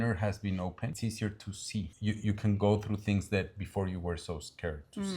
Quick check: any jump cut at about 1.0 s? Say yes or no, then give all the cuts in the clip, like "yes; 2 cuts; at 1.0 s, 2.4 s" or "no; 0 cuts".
yes; 2 cuts; at 1.0 s, 1.9 s